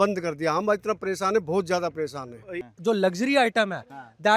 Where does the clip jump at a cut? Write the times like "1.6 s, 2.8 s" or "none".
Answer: 2.6 s